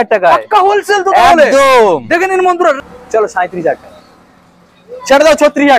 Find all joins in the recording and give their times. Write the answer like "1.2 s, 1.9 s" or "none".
2.8 s